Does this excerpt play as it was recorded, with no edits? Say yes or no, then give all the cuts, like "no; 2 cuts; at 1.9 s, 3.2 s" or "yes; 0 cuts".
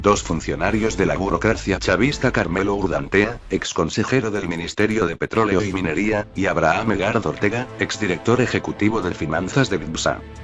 yes; 0 cuts